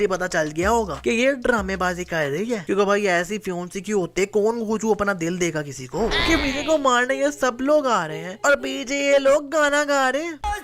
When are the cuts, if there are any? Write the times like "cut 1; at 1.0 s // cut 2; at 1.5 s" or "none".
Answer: cut 1; at 6.2 s